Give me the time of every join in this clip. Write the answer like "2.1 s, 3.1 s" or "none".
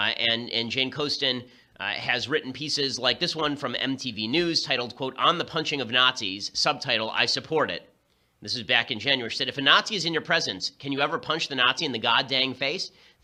none